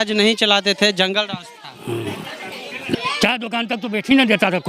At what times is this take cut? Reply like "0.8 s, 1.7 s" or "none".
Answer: 3.0 s